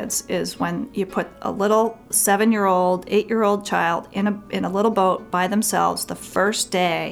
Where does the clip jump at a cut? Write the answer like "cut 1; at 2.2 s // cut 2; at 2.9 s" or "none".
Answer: none

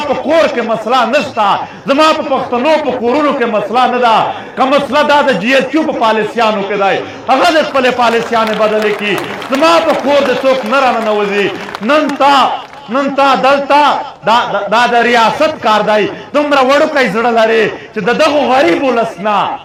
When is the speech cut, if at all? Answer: none

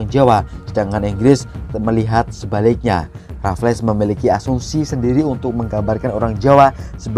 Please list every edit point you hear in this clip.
none

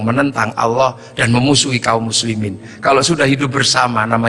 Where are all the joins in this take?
none

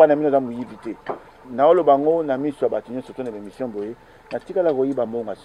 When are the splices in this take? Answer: cut 1; at 1.5 s

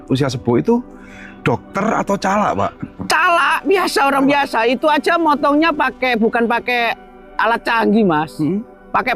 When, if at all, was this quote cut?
cut 1; at 2.9 s

